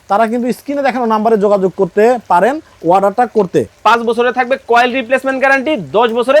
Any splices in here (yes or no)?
yes